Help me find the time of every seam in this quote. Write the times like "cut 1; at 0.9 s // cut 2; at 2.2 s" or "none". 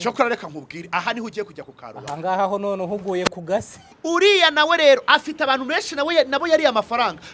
cut 1; at 3.8 s